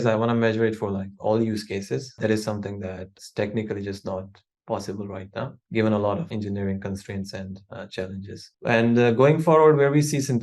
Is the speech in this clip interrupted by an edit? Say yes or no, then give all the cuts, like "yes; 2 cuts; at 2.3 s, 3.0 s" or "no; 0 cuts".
yes; 4 cuts; at 2.1 s, 3.2 s, 5.6 s, 6.3 s